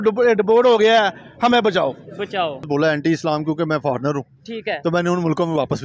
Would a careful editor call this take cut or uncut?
cut